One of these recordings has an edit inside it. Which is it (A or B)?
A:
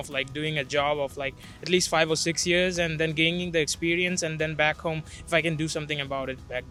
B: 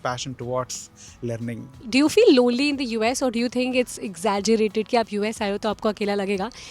B